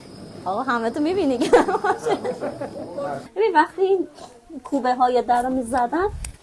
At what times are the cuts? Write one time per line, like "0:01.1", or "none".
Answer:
0:03.3